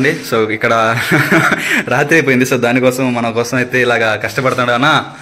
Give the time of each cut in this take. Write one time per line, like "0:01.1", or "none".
none